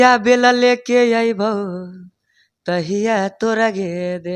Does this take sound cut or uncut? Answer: uncut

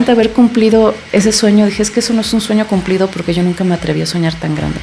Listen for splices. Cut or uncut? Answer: uncut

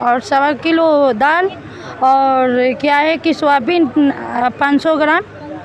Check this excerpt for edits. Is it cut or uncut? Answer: uncut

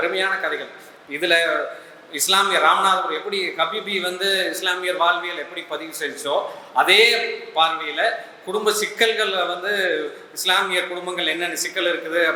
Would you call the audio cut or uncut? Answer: uncut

